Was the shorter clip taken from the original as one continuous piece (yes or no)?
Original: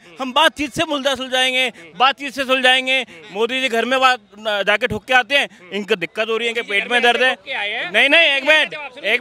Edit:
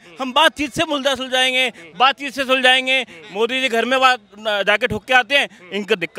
yes